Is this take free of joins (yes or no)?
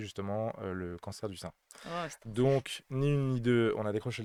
yes